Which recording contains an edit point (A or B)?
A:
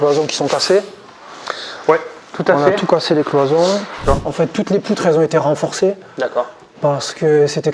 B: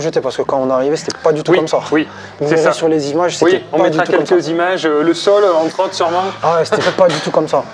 A